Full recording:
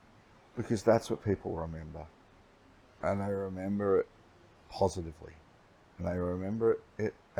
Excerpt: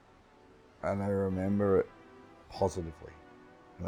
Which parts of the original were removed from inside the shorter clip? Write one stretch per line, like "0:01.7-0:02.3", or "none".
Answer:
none